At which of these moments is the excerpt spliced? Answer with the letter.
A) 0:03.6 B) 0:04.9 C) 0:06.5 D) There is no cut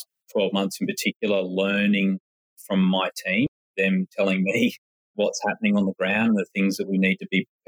A